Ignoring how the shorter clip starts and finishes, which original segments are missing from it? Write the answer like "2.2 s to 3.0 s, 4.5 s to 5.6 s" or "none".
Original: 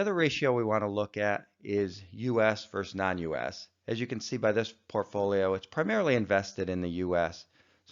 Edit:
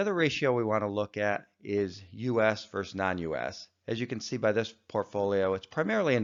none